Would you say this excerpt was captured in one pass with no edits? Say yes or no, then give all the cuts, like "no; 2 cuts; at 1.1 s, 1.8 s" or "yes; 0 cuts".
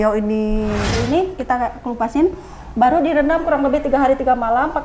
no; 1 cut; at 0.9 s